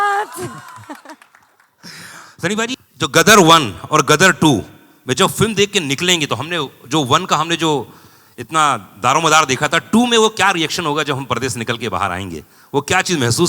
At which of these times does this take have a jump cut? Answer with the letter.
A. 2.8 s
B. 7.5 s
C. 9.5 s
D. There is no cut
A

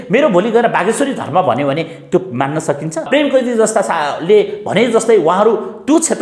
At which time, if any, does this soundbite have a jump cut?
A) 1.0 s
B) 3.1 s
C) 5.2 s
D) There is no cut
B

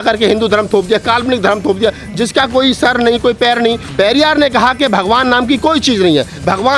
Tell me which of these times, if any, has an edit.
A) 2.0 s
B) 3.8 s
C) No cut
B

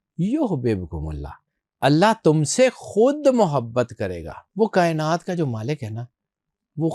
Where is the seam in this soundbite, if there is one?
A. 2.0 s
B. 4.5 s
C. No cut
B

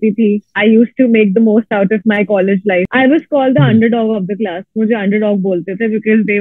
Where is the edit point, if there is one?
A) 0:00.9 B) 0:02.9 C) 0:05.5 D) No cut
B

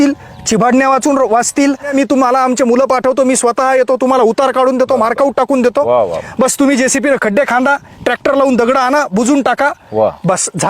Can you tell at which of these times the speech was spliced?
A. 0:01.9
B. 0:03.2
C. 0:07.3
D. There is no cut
A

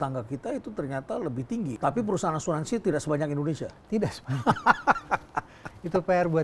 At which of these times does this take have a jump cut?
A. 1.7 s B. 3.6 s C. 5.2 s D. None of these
A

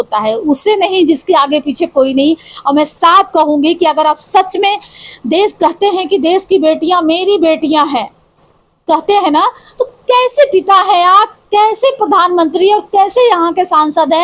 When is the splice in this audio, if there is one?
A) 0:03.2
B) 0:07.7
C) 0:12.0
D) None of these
D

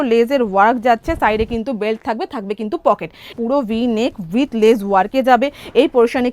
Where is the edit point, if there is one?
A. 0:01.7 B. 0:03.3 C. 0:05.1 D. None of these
B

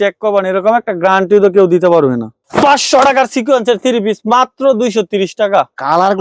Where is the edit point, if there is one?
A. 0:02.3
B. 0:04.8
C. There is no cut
A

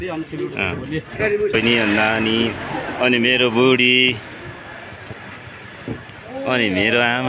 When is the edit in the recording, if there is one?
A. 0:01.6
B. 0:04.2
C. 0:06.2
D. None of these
A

